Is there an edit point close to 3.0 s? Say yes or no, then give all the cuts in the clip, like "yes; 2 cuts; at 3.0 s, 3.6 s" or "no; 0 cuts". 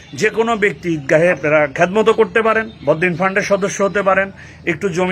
no; 1 cut; at 1.4 s